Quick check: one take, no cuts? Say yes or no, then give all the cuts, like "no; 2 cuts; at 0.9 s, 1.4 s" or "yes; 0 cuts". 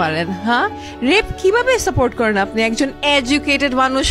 yes; 0 cuts